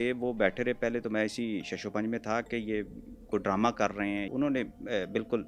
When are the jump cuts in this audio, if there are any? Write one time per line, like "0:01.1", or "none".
0:04.3